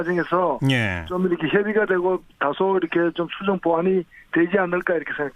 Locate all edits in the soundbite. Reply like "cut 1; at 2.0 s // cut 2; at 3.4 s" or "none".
cut 1; at 3.7 s